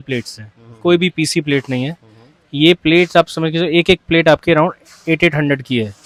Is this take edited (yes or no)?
no